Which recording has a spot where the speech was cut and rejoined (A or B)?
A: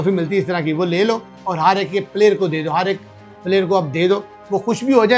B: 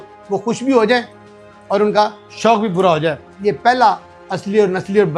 B